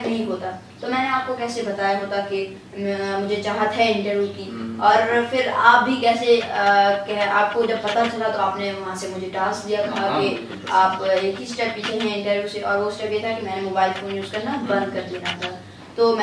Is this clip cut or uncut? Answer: uncut